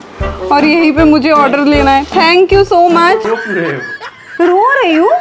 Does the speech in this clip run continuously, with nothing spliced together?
no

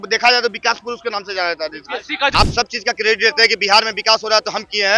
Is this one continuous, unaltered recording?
no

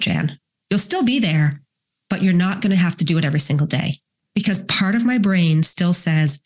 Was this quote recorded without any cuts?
yes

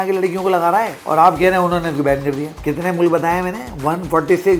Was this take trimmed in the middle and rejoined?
yes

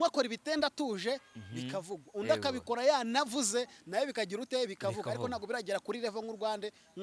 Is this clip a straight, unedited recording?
yes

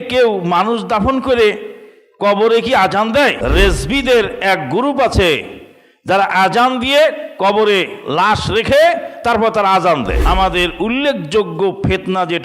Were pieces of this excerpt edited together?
yes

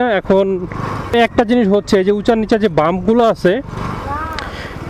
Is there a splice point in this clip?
yes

